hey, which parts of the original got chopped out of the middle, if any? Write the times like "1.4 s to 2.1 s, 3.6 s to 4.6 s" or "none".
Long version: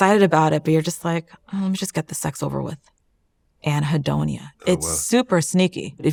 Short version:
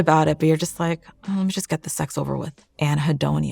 2.9 s to 3.5 s